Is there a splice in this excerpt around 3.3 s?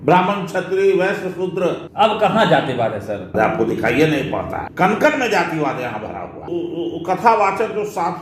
yes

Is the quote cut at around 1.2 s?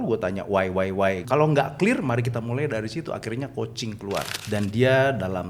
yes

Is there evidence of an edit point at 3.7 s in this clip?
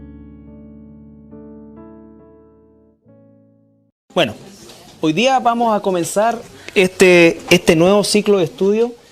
yes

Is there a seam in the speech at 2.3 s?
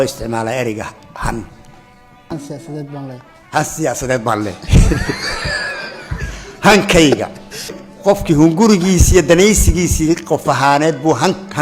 yes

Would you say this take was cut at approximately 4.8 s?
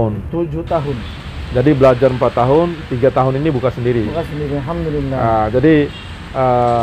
no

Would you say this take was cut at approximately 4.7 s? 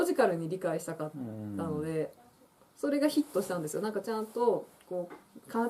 no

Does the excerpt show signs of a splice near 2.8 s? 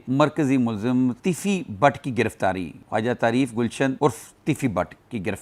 no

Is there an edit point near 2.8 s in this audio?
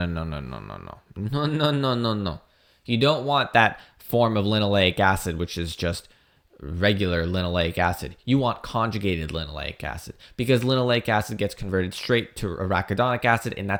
no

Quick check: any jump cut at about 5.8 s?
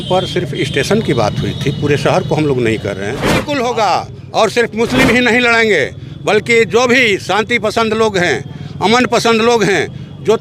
no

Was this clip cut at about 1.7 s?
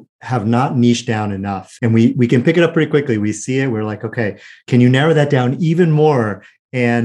yes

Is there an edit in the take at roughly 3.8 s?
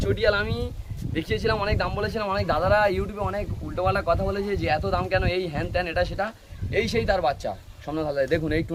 no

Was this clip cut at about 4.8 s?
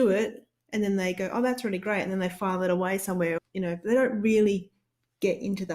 no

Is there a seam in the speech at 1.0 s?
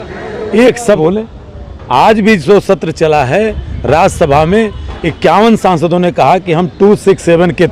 yes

